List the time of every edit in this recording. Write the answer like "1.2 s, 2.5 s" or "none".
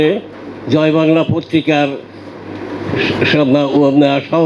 none